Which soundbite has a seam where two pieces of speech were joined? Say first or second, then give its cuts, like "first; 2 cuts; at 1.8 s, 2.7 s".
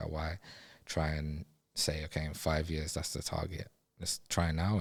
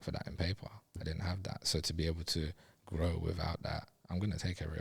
second; 1 cut; at 0.9 s